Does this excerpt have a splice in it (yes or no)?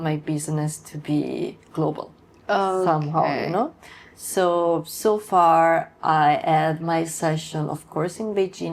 no